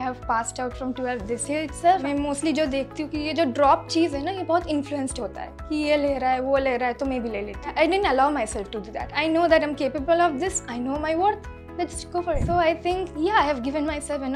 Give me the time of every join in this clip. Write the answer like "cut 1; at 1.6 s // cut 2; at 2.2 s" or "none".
cut 1; at 2.0 s // cut 2; at 7.7 s // cut 3; at 9.0 s // cut 4; at 12.4 s